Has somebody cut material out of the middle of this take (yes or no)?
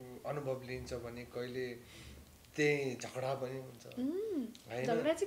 no